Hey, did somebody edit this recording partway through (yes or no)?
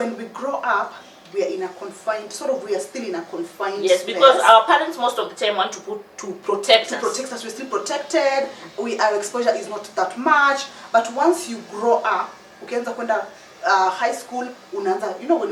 no